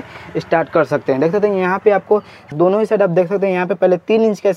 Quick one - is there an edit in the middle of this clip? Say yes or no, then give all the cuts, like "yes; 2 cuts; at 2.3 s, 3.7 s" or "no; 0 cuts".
yes; 1 cut; at 2.5 s